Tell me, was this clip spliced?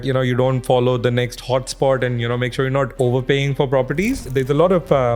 yes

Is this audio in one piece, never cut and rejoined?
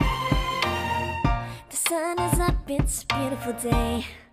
no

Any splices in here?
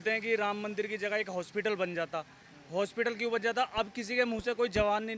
no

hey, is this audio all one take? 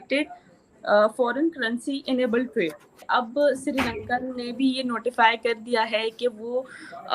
no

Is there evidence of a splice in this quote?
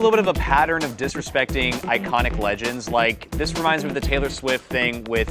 no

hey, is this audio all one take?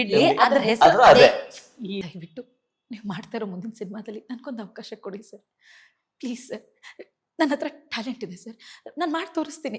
no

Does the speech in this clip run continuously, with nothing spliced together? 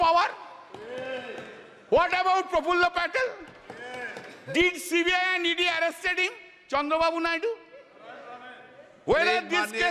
yes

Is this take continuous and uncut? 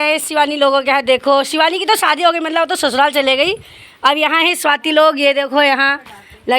yes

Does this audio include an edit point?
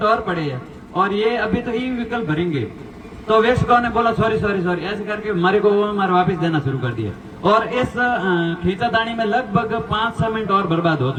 no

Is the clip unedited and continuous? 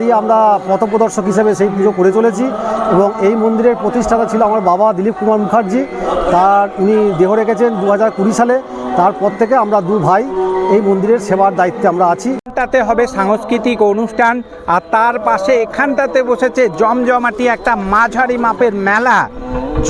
yes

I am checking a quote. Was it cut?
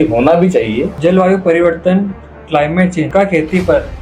yes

